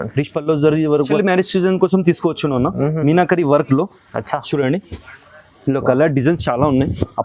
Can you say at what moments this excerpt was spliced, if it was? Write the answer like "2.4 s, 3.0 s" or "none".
1.2 s